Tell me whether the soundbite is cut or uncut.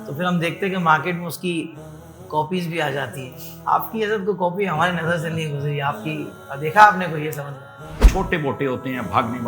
cut